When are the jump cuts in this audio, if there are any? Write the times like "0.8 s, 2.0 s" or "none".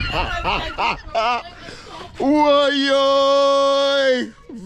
none